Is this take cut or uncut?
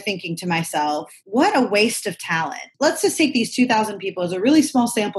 cut